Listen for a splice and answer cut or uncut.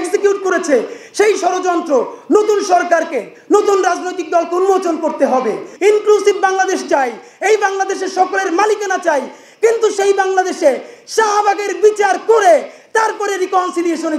cut